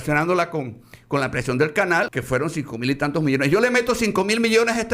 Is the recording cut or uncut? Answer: cut